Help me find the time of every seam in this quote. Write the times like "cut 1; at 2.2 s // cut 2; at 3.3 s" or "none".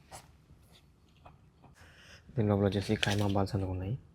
cut 1; at 2.1 s